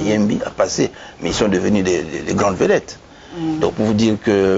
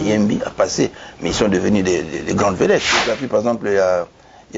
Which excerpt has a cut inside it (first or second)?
second